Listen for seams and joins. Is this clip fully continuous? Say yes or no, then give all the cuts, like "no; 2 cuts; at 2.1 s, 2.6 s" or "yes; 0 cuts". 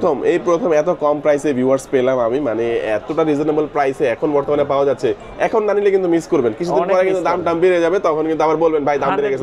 yes; 0 cuts